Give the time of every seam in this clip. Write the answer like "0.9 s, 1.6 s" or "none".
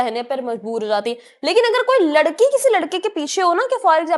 none